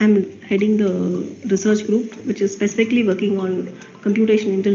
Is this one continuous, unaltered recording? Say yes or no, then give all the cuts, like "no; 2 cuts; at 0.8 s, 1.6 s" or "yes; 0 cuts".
no; 1 cut; at 3.2 s